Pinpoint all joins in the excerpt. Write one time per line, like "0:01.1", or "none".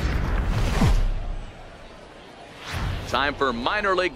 0:03.1